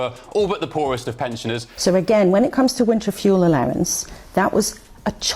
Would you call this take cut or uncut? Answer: cut